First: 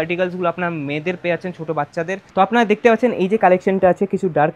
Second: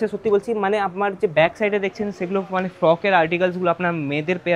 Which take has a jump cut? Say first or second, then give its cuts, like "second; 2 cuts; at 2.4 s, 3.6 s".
first; 1 cut; at 2.3 s